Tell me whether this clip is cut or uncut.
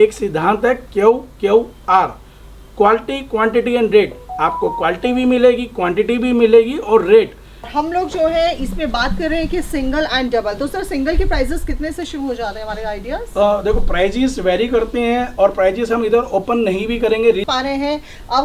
cut